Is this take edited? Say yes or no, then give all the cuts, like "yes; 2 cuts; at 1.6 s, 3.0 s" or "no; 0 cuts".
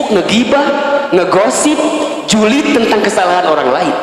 no; 0 cuts